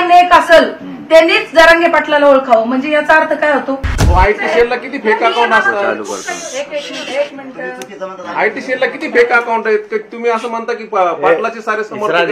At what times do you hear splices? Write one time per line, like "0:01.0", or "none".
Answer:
0:03.9